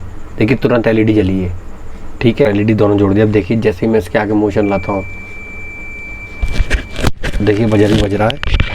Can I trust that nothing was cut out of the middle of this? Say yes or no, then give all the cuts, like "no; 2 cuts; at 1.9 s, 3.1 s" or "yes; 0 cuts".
no; 1 cut; at 2.5 s